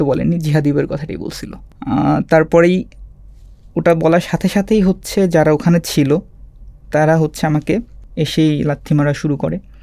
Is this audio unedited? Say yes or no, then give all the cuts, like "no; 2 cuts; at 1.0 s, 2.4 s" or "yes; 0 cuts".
no; 1 cut; at 8.0 s